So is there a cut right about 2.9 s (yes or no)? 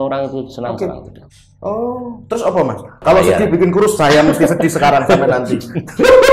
yes